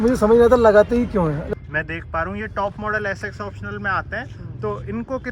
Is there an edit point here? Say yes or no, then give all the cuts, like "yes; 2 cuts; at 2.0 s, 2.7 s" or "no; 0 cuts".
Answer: yes; 1 cut; at 1.4 s